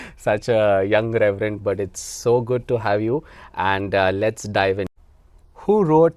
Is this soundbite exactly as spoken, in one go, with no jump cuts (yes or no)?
yes